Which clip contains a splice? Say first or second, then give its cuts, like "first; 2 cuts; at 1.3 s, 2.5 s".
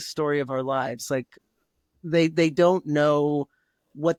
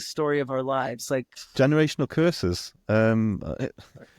second; 1 cut; at 1.4 s